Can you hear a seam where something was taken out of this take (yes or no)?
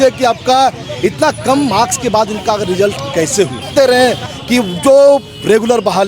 yes